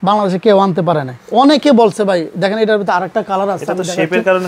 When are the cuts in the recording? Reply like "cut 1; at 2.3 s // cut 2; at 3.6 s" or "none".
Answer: none